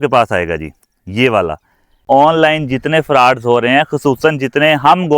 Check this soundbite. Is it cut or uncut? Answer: cut